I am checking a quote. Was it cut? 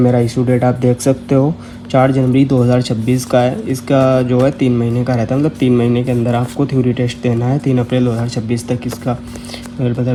no; 0 cuts

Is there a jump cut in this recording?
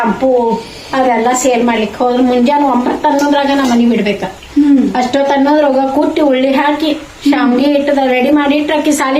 no; 0 cuts

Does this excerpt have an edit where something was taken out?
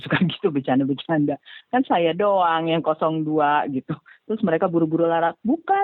no; 0 cuts

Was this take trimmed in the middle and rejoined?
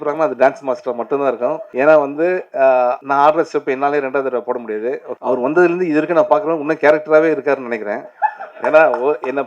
yes; 3 cuts; at 1.6 s, 3.0 s, 5.1 s

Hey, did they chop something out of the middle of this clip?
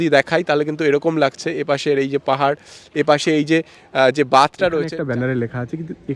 yes; 1 cut; at 4.9 s

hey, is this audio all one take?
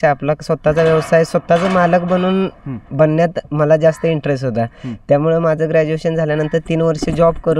yes; 0 cuts

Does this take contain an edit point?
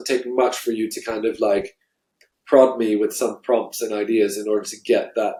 no; 0 cuts

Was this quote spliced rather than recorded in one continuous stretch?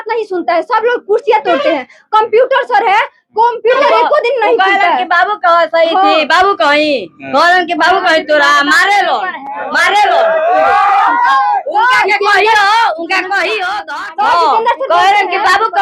no; 0 cuts

